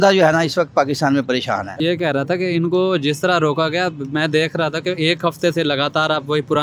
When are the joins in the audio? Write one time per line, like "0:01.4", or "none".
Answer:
0:01.8